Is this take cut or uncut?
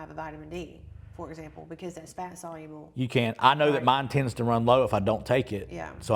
uncut